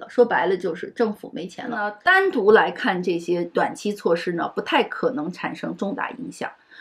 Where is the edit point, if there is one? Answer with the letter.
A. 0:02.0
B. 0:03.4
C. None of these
A